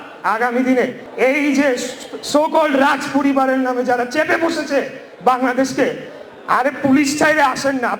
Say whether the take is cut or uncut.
cut